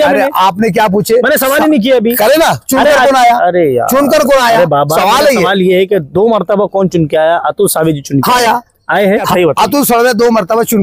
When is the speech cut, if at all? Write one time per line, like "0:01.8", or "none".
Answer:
0:09.3